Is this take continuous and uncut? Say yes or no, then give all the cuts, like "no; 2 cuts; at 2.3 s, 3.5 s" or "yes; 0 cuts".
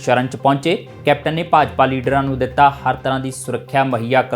yes; 0 cuts